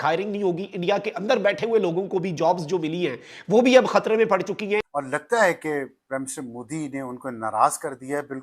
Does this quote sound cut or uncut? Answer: cut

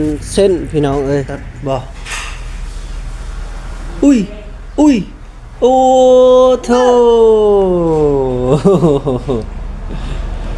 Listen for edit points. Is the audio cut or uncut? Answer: cut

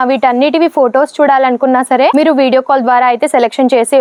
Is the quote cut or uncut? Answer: uncut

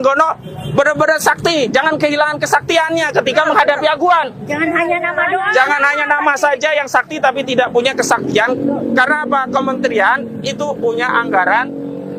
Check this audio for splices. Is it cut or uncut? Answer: uncut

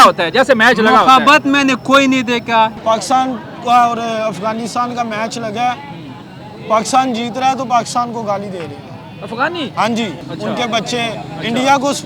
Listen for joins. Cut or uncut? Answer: cut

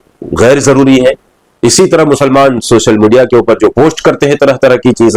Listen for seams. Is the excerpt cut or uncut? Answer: uncut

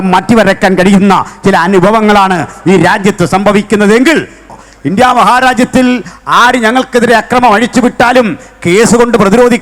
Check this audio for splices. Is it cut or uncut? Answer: cut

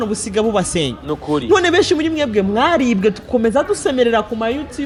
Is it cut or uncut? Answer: uncut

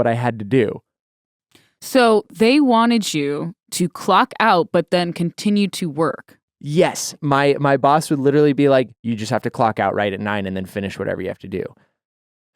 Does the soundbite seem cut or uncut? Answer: cut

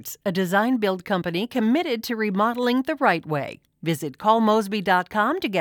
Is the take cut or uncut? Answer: uncut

